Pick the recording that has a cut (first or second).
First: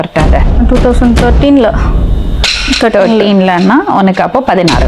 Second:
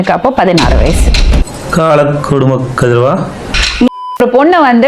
second